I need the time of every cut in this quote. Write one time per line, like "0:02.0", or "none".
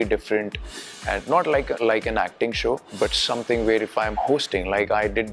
0:01.8
0:02.9